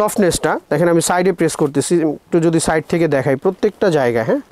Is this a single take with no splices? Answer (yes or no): yes